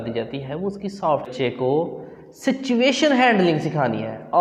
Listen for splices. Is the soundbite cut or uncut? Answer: cut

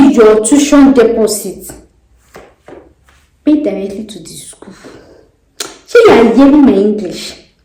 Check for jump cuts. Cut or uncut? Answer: uncut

